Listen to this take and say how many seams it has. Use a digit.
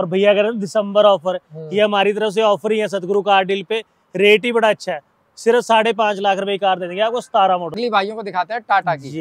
1